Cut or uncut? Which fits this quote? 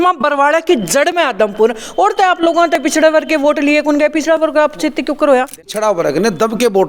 cut